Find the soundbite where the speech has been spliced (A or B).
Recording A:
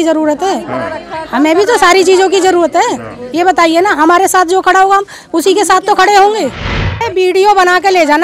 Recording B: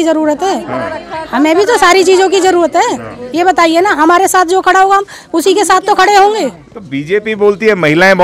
A